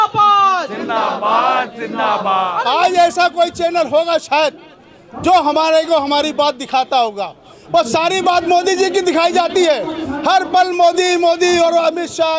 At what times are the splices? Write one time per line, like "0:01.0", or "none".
0:02.6